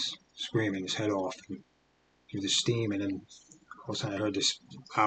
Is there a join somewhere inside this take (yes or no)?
no